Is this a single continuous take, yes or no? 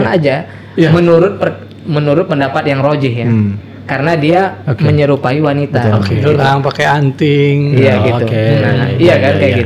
yes